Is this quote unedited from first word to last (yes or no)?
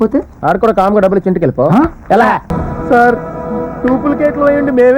no